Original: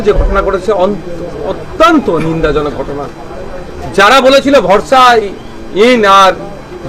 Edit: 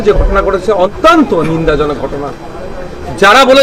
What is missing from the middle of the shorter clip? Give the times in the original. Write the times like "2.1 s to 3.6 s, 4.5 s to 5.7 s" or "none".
0.9 s to 1.7 s